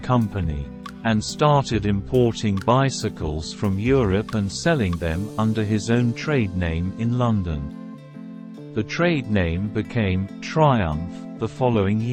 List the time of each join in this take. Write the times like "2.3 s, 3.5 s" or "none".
none